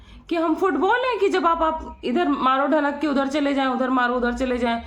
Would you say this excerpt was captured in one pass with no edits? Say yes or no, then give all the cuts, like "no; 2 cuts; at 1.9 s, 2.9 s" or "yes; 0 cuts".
yes; 0 cuts